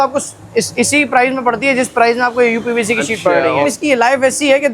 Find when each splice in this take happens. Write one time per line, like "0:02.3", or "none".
0:03.7